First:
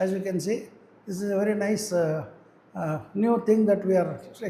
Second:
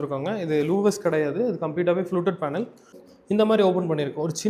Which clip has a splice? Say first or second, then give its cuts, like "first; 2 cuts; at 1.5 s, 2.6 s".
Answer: second; 1 cut; at 3.0 s